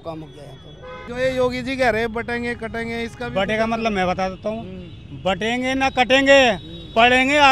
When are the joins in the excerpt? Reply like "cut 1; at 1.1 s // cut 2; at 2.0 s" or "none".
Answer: cut 1; at 1.1 s